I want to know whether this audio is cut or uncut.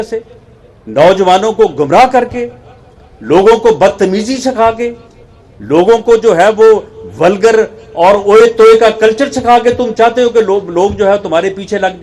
uncut